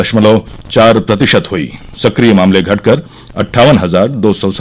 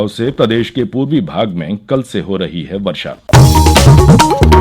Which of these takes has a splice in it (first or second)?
second